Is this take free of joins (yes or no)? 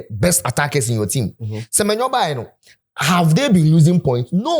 yes